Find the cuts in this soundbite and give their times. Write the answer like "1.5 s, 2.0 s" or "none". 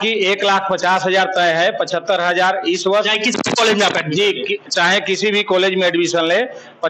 none

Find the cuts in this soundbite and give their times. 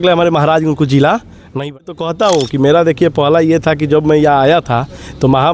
1.8 s

